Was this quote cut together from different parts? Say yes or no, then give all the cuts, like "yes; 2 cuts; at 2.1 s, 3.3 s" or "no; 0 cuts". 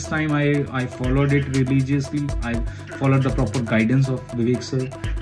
no; 0 cuts